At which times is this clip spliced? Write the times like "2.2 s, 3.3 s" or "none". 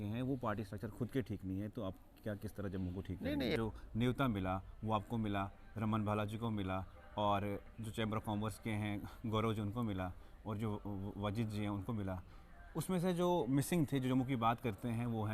3.6 s